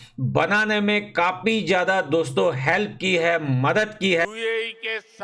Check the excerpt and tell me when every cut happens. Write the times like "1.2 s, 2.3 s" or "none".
4.1 s